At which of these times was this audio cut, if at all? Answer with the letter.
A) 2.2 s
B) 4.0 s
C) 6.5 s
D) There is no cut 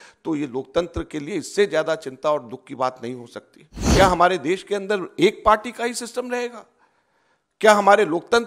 B